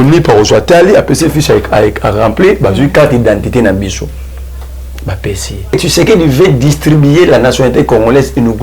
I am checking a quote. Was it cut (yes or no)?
yes